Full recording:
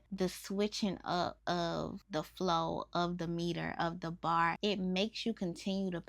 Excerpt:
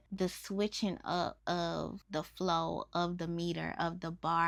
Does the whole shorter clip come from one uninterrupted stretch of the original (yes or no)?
yes